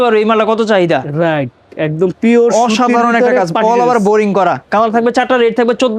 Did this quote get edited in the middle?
no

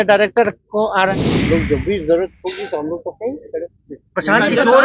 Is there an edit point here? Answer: yes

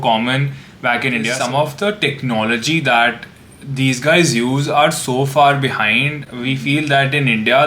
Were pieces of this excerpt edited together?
yes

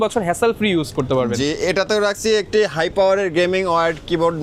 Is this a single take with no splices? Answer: yes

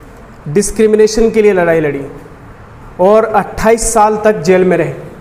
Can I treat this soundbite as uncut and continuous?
yes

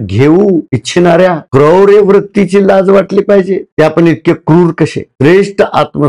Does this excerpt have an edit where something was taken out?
yes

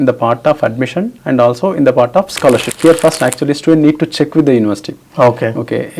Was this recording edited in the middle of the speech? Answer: yes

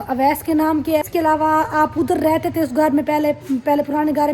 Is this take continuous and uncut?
no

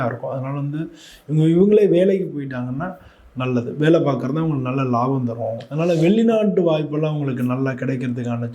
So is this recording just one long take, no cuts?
no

